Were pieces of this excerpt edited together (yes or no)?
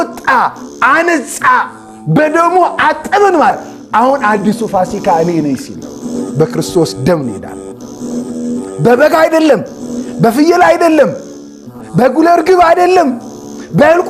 yes